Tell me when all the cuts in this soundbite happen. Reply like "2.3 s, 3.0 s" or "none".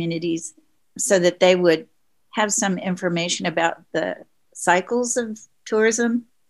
none